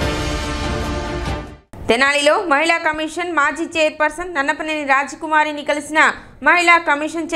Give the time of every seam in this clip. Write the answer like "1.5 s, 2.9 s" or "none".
1.5 s